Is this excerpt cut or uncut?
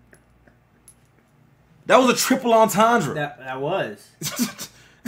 uncut